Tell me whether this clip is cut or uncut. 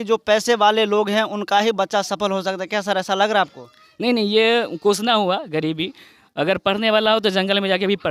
uncut